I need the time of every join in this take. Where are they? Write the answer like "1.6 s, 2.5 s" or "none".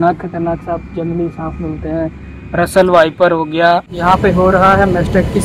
3.9 s